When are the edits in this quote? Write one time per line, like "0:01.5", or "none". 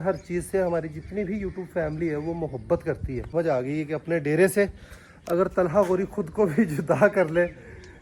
0:03.3